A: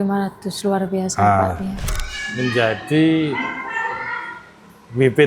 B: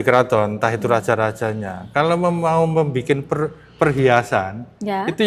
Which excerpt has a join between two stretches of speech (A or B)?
A